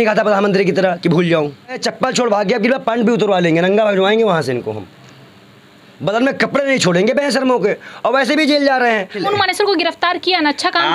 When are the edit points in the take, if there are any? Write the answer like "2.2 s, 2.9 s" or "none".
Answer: 1.8 s, 9.2 s